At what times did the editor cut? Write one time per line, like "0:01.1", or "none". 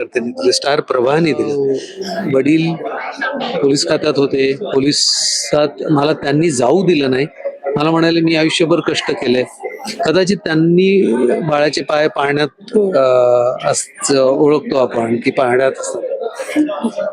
0:01.6